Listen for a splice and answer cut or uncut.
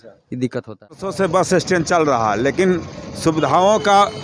cut